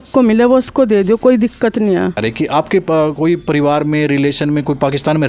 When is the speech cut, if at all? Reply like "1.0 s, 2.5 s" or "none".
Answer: 2.2 s